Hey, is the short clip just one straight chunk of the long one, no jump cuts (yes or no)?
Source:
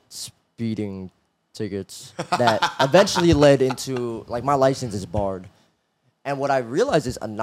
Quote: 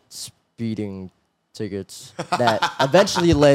yes